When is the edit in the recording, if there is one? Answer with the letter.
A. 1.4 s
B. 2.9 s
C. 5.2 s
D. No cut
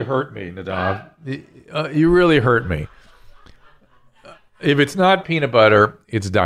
C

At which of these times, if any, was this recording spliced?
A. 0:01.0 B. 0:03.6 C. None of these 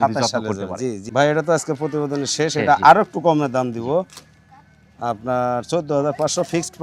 A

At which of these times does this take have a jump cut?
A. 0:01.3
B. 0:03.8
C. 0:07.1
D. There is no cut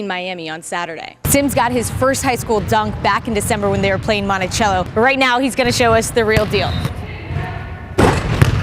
A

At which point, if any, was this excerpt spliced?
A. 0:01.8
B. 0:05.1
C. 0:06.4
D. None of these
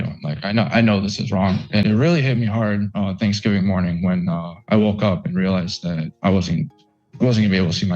A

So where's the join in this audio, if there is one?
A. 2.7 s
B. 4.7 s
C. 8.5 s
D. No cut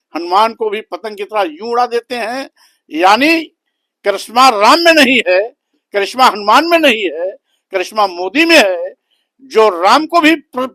D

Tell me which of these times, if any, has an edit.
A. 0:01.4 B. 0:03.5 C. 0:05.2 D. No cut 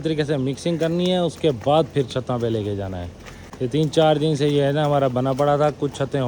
D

